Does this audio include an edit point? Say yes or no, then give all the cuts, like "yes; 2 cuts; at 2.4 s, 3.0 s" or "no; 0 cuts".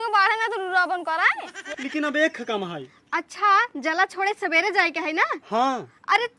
yes; 1 cut; at 1.5 s